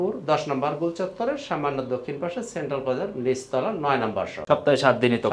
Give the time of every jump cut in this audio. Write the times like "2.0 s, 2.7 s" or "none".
4.4 s